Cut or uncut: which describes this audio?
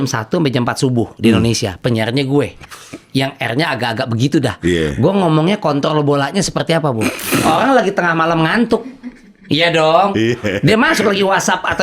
uncut